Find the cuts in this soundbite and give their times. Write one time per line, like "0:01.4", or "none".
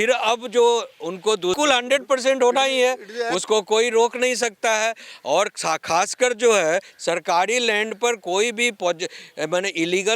0:01.6